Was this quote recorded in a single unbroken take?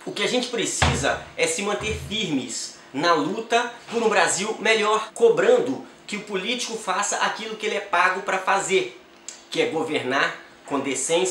no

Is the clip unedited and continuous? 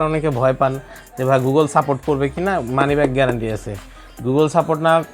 yes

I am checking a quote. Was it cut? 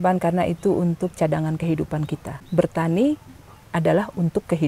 yes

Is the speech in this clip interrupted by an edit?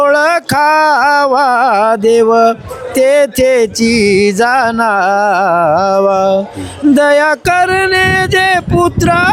no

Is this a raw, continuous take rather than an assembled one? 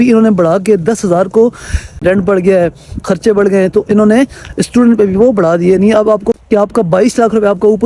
no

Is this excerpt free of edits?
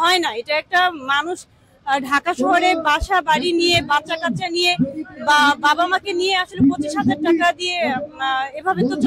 yes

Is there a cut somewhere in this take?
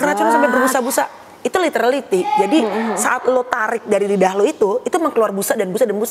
no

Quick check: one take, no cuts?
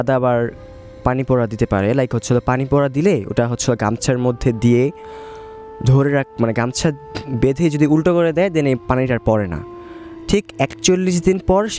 yes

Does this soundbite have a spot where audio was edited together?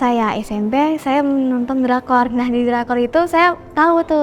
no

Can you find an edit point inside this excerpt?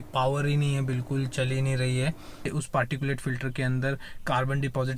yes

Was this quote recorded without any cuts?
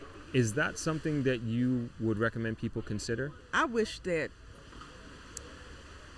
no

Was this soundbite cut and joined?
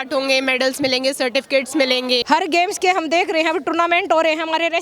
yes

